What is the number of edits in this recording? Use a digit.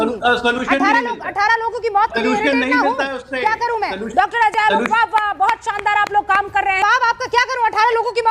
1